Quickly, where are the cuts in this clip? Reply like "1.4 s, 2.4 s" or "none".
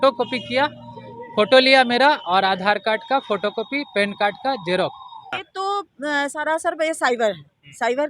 5.4 s

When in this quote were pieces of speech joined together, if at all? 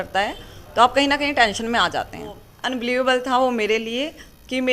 2.5 s

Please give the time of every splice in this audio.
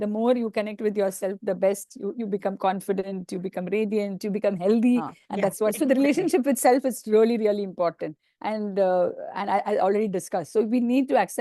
5.7 s

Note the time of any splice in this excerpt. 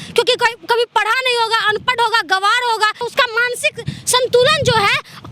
3.0 s

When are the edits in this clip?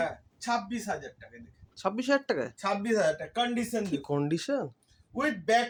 none

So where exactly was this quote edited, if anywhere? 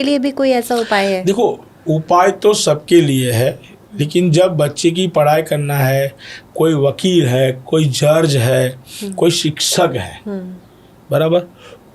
none

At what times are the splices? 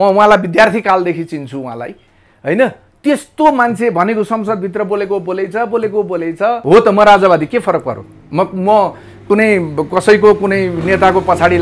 6.6 s

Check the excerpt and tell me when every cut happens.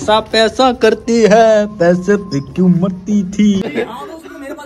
3.6 s

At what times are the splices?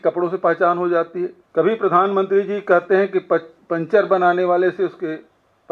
1.4 s

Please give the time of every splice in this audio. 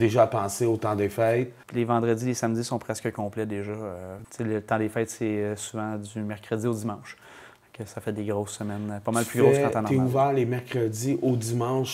1.6 s, 4.1 s

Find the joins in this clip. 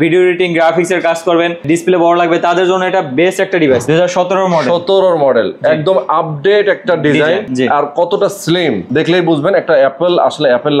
1.6 s, 3.8 s, 7.5 s, 8.8 s

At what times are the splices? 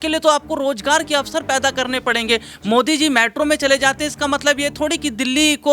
none

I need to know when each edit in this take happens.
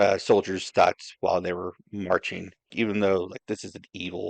2.7 s

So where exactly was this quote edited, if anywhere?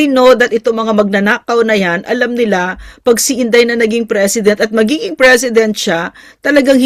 none

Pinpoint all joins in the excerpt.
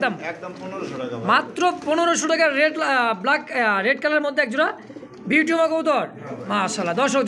none

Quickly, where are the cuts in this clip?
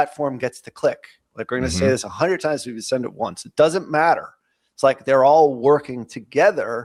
none

